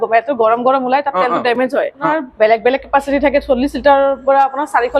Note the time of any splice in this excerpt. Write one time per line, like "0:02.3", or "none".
0:02.1